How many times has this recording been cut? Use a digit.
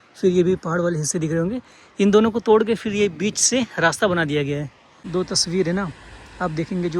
1